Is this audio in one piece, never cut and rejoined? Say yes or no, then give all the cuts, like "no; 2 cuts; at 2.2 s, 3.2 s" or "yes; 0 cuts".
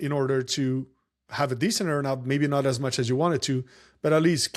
yes; 0 cuts